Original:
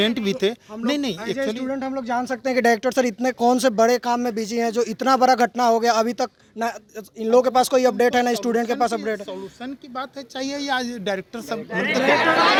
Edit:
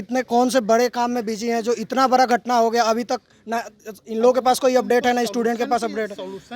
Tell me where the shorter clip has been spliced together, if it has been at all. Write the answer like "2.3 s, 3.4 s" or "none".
none

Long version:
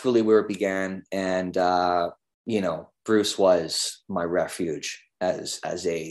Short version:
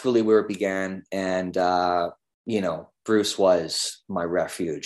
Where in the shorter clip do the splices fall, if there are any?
none

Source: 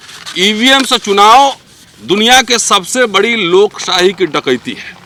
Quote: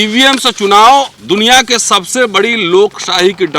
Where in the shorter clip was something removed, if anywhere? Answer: 1.2 s

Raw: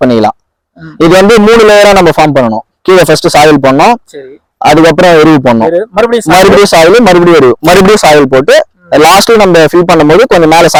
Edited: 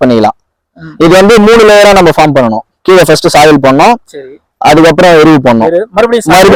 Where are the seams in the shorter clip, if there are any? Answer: none

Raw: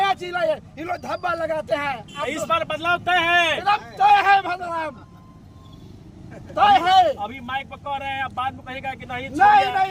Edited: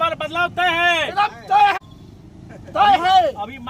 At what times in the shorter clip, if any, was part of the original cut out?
1.8 s

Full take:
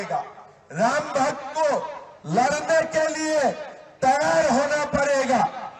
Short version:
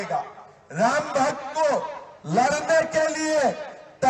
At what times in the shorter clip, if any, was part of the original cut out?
none

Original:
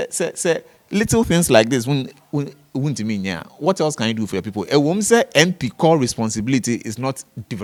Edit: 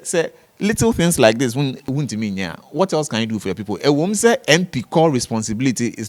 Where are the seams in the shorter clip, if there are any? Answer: 1.8 s

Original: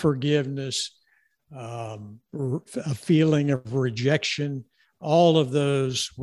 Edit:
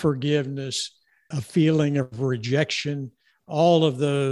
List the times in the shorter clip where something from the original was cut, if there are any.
1.4 s

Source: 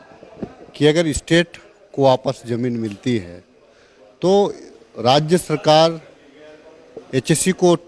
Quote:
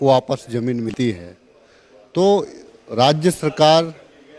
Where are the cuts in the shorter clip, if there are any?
0.9 s

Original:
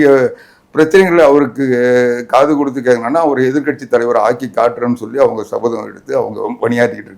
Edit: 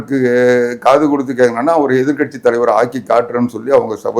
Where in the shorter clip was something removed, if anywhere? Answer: none

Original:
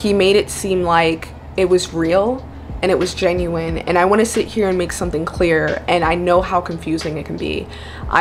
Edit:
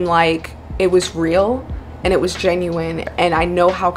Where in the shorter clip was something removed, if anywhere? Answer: 3.1 s

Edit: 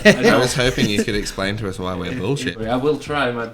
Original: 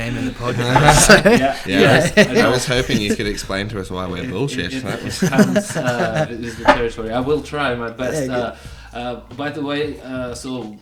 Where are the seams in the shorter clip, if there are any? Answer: 2.5 s

